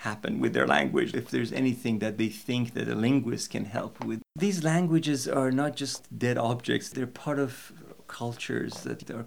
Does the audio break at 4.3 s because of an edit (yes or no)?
yes